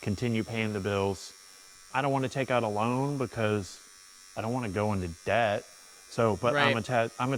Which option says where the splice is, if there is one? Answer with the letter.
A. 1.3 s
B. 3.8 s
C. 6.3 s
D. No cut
D